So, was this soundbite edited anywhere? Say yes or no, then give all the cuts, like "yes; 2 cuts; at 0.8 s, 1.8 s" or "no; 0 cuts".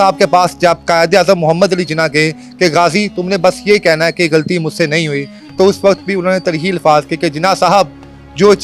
no; 0 cuts